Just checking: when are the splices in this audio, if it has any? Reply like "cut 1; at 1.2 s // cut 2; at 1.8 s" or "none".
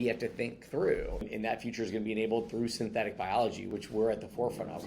cut 1; at 1.3 s // cut 2; at 3.7 s